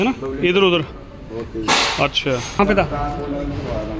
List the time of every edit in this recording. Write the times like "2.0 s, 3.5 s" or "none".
2.5 s